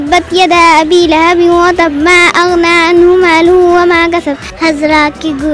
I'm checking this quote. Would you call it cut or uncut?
cut